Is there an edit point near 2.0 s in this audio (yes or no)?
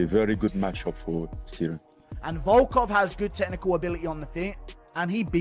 yes